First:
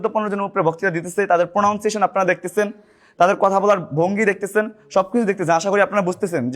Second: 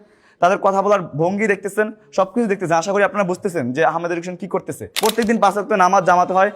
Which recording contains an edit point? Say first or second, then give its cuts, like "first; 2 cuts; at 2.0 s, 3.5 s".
second; 1 cut; at 4.8 s